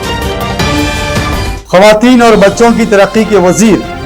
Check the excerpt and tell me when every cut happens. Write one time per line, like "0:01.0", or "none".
0:01.3